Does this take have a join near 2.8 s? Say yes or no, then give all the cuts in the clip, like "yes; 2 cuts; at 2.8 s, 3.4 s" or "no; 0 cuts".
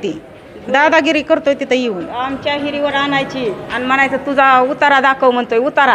no; 0 cuts